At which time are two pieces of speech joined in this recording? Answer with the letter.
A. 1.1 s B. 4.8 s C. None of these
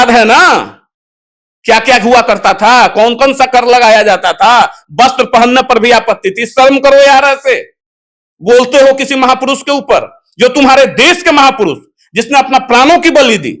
C